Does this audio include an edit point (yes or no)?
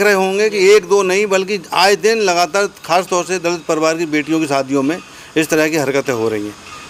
no